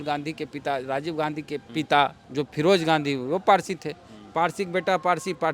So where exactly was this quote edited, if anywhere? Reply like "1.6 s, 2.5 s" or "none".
1.7 s, 2.2 s